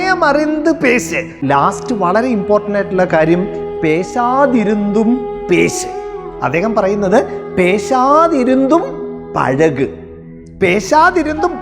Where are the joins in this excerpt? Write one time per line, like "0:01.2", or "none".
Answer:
0:01.3